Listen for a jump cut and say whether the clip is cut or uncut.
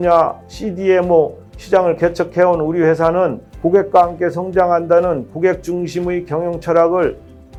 uncut